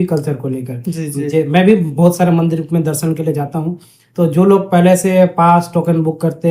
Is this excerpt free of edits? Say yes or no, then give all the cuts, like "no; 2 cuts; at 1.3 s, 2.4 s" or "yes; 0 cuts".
yes; 0 cuts